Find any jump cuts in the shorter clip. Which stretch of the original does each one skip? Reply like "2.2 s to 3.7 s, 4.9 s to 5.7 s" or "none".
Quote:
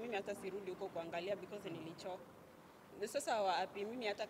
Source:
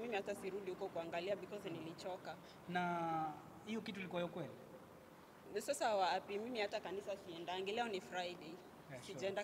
2.2 s to 4.8 s